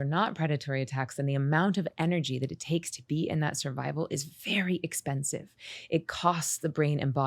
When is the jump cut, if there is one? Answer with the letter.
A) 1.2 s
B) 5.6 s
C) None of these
C